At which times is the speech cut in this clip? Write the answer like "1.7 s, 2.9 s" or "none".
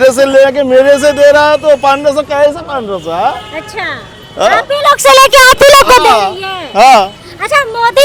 none